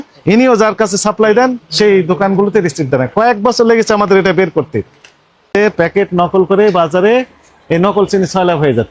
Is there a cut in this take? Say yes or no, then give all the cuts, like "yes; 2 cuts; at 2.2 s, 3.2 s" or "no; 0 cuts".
yes; 1 cut; at 5.5 s